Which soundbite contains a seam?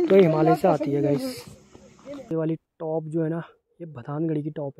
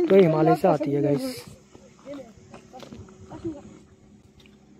first; 1 cut; at 2.3 s

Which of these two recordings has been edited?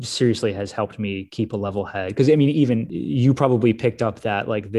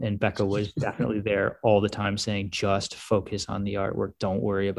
first; 1 cut; at 2.9 s

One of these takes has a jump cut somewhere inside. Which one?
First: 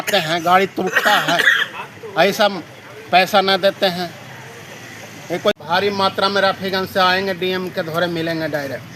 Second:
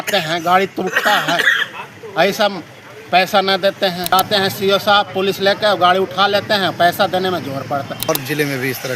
second; 2 cuts; at 4.1 s, 8.1 s

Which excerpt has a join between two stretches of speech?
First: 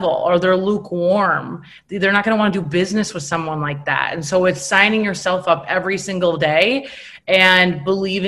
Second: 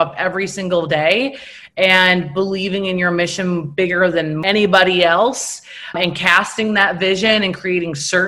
second; 2 cuts; at 4.4 s, 5.9 s

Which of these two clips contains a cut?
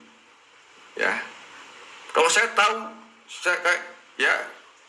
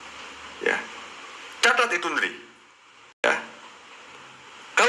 second; 1 cut; at 3.2 s

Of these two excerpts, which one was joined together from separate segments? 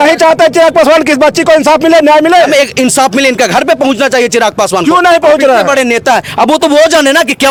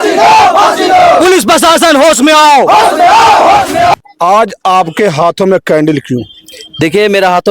second; 1 cut; at 3.9 s

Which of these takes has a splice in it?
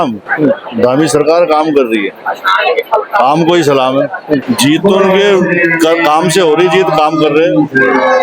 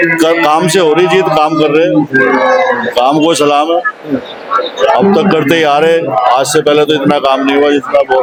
first; 1 cut; at 4.4 s

